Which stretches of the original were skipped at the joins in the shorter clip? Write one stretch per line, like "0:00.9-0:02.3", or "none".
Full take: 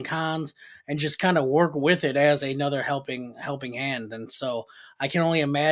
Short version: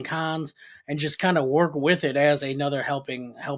none